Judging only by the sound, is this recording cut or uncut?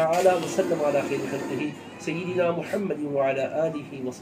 uncut